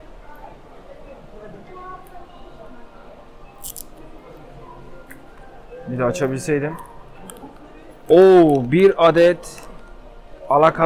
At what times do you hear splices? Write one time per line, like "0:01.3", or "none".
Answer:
none